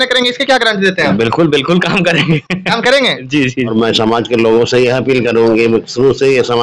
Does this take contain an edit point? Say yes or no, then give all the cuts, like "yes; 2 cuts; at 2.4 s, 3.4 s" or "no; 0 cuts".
yes; 1 cut; at 3.7 s